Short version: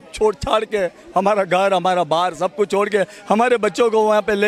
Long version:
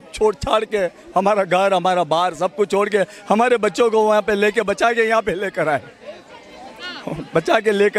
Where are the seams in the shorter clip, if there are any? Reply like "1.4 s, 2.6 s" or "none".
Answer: none